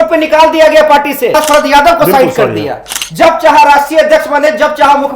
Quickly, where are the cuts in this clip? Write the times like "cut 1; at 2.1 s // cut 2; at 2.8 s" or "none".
cut 1; at 1.3 s

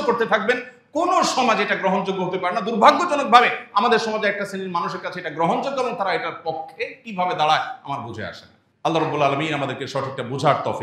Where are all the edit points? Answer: none

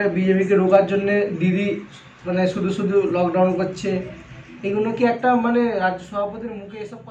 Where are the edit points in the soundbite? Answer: none

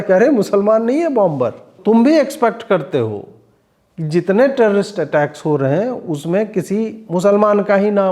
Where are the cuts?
cut 1; at 1.7 s

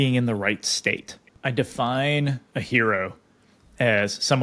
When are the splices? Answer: cut 1; at 1.3 s

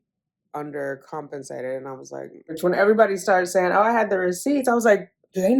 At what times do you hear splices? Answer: cut 1; at 2.6 s

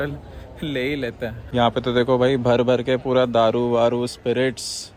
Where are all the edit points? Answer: none

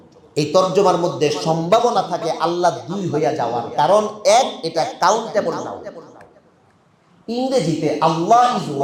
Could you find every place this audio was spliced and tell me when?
none

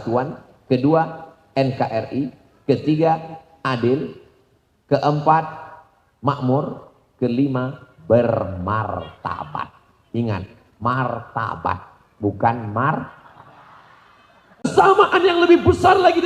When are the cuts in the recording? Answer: cut 1; at 14.6 s

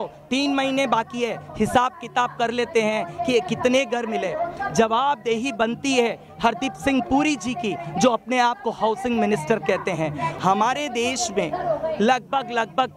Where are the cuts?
cut 1; at 10.3 s

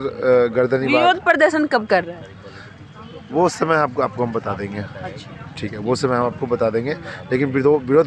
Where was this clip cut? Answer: none

